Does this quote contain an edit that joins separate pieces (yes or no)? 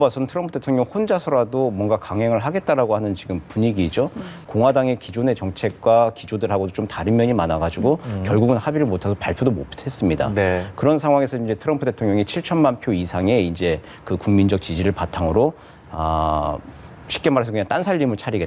yes